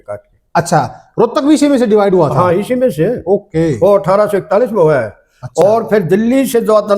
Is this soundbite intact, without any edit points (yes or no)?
yes